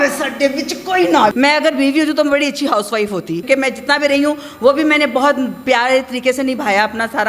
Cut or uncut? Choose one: cut